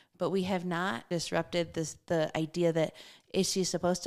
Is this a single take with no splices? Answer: no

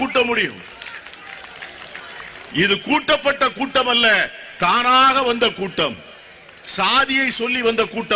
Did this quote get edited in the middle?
no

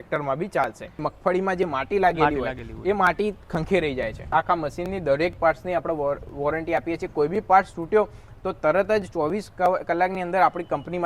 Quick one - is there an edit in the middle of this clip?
yes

